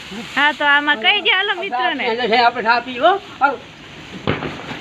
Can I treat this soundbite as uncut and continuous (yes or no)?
yes